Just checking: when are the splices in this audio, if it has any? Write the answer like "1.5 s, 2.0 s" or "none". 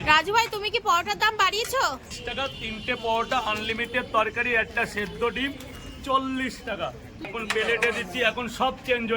2.0 s, 7.3 s